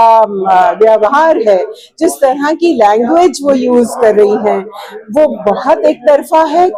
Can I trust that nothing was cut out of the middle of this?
yes; 0 cuts

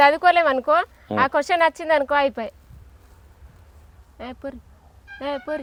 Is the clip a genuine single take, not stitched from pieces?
yes; 0 cuts

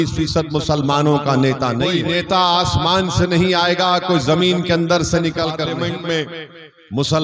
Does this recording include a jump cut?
yes; 2 cuts; at 1.8 s, 5.6 s

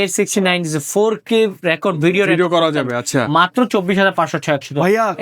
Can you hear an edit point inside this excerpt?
no; 0 cuts

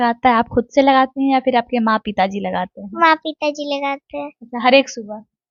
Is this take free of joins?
yes; 0 cuts

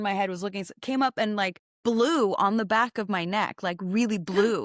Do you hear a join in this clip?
no; 0 cuts

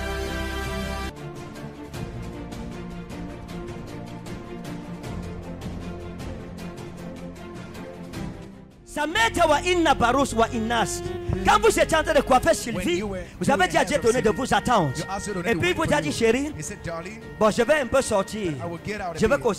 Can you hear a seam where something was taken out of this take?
yes; 1 cut; at 8.5 s

